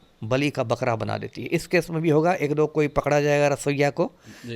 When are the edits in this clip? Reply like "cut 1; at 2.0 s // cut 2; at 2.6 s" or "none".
none